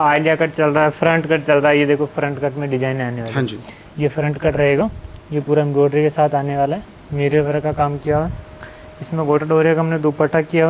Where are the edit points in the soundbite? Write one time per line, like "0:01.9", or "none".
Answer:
none

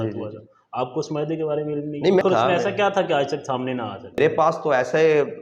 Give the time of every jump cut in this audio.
0:02.2
0:04.2

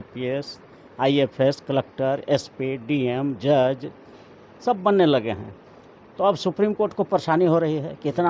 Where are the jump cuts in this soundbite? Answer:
none

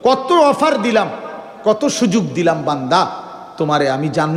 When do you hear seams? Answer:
none

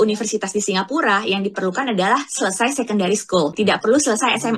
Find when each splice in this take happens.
0:03.5

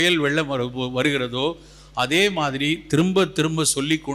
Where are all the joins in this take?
none

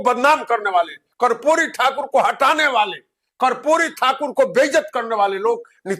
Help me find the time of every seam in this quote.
none

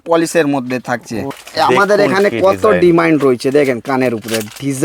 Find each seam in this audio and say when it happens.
0:01.4

